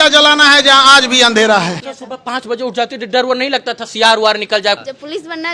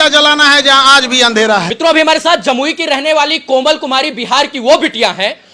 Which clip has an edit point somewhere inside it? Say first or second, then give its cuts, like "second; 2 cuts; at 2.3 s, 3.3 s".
first; 2 cuts; at 1.7 s, 4.8 s